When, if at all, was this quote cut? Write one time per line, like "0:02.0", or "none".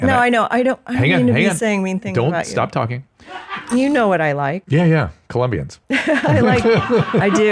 0:03.7
0:04.6
0:05.7